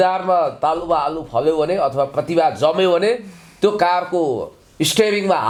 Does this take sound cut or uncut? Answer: uncut